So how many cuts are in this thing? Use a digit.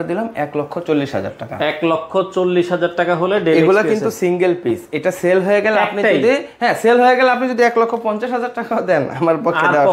0